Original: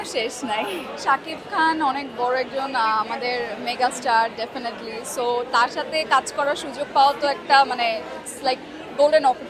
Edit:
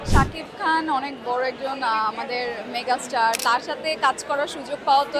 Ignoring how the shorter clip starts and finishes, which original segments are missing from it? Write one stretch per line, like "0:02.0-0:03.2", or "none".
0:04.3-0:05.5

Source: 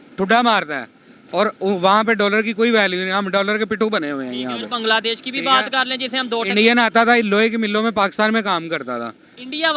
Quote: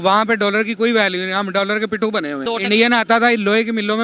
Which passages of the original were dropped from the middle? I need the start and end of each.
0:04.2-0:06.3

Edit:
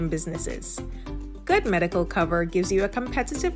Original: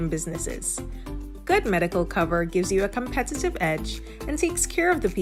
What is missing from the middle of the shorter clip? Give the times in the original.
none

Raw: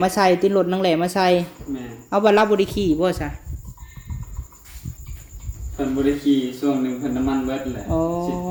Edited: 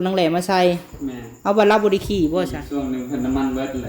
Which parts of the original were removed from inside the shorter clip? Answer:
0:03.3-0:06.5

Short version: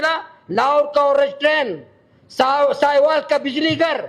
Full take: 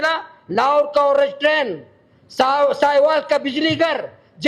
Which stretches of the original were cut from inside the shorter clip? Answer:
none

